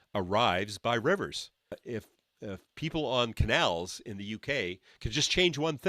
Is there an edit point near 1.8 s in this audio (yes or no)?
yes